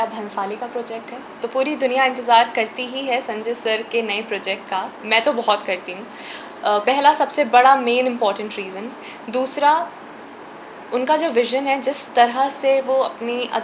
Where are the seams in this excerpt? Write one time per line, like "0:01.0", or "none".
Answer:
none